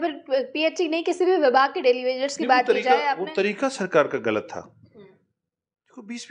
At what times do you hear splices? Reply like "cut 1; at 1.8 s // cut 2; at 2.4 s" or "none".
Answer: none